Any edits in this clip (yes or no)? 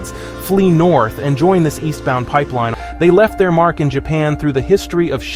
yes